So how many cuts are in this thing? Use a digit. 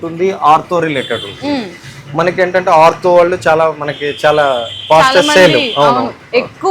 0